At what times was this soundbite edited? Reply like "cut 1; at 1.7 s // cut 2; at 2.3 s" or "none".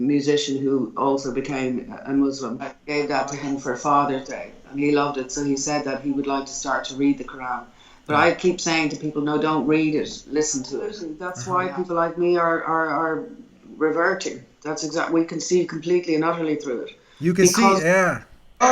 cut 1; at 2.7 s // cut 2; at 11.3 s

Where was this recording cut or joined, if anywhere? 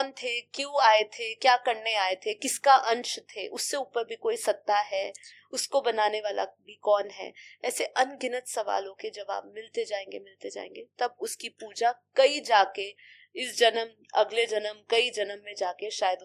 none

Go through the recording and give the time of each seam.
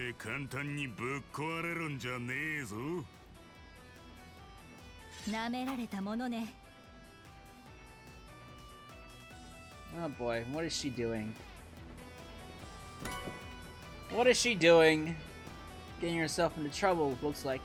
none

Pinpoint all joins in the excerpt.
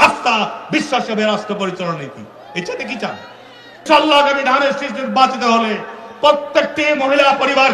cut 1; at 3.8 s

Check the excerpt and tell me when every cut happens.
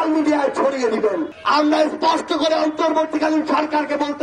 cut 1; at 1.3 s

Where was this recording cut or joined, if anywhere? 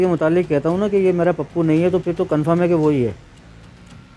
none

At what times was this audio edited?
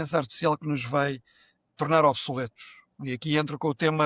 none

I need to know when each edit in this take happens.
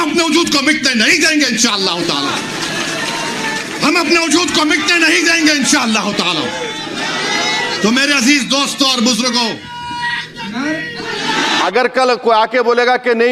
cut 1; at 11.6 s

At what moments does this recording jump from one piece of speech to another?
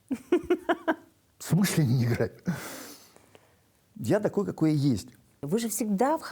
cut 1; at 5.4 s

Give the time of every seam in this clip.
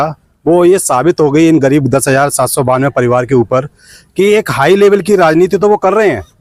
none

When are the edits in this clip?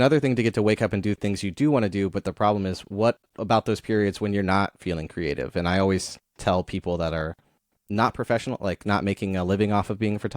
none

